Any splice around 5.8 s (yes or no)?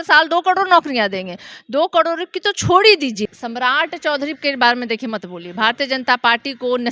no